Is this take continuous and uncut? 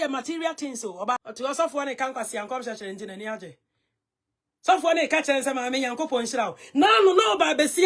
no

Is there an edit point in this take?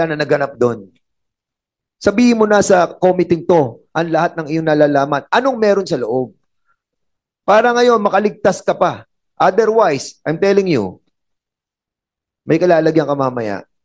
no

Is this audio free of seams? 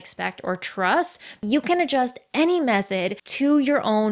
no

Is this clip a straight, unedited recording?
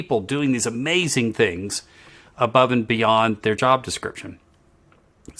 yes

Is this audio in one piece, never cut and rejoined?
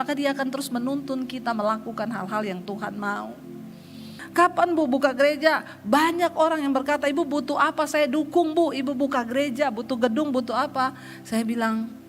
no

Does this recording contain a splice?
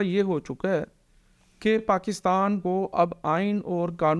no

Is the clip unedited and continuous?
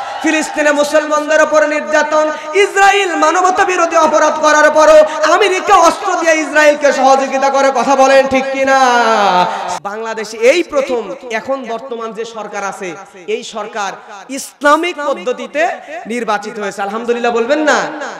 no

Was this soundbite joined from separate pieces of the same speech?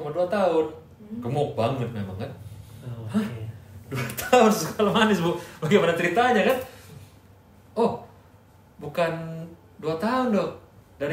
no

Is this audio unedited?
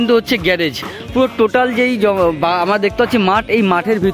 yes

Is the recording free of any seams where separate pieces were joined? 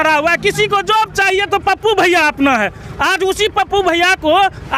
yes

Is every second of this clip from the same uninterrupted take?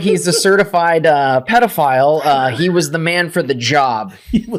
yes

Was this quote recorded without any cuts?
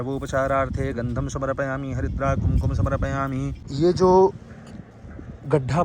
no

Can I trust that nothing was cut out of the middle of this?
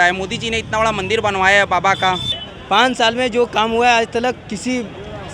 no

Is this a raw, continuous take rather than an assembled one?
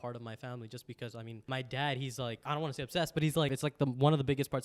no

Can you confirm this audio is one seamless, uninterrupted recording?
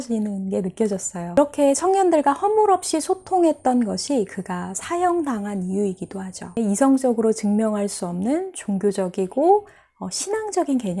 no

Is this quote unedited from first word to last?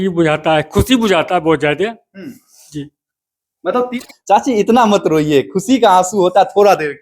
no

